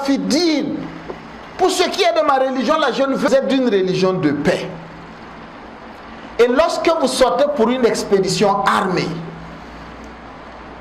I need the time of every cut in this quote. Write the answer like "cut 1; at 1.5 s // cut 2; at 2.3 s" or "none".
cut 1; at 3.3 s